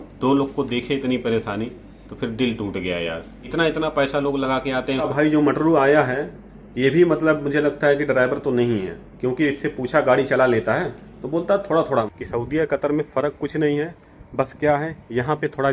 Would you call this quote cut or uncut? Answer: cut